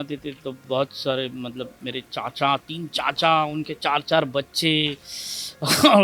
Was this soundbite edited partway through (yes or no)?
no